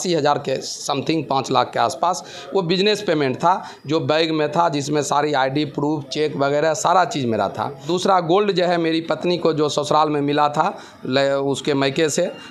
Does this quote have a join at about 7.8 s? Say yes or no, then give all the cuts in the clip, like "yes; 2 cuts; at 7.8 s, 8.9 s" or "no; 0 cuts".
yes; 1 cut; at 7.8 s